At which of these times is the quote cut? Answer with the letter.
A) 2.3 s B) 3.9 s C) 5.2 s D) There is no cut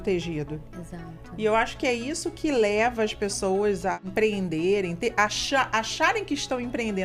B